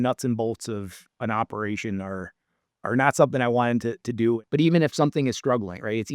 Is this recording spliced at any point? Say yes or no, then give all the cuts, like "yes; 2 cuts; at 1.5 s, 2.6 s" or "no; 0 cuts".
yes; 1 cut; at 4.4 s